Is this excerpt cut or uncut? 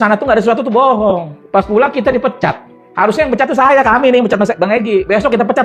cut